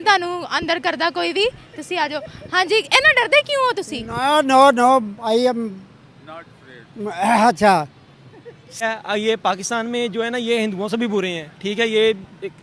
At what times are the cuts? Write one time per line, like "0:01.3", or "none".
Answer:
0:08.8